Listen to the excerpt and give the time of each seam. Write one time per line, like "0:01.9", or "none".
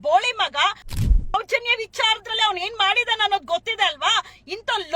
0:01.3